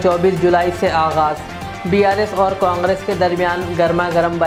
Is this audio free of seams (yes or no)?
yes